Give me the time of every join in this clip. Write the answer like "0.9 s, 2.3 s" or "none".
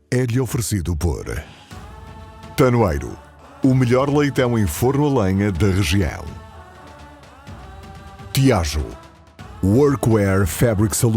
8.3 s